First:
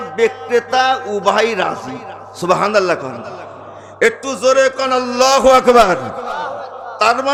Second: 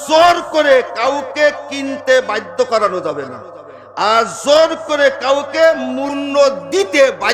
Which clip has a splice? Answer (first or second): second